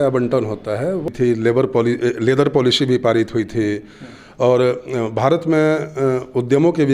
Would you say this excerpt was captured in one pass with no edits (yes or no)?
no